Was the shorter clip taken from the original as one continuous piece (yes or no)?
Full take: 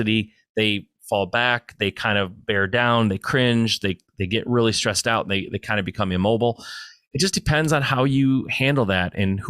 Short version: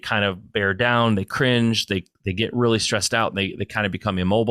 yes